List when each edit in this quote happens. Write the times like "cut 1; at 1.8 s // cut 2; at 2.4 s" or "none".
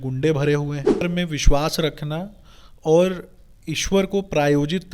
cut 1; at 1.0 s